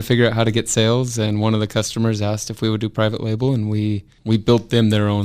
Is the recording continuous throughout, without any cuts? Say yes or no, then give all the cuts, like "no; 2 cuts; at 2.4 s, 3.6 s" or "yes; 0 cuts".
no; 1 cut; at 4.1 s